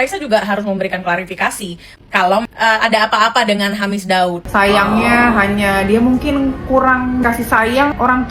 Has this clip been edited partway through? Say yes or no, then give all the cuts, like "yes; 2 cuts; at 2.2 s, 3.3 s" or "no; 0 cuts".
yes; 2 cuts; at 2.4 s, 4.4 s